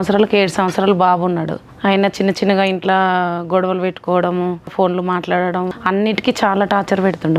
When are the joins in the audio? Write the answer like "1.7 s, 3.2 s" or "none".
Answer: 1.6 s, 4.7 s, 5.7 s